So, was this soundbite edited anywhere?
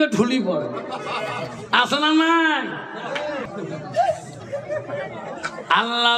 yes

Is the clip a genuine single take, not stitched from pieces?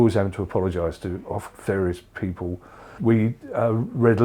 yes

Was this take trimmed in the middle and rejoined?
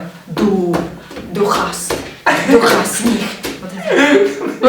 no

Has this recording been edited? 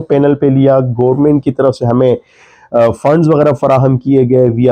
no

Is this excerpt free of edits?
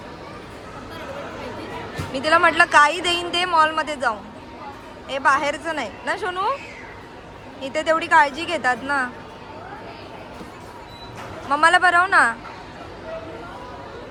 yes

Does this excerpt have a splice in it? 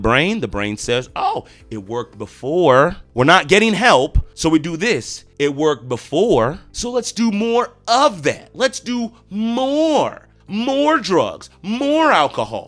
no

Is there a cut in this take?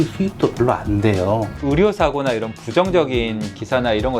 yes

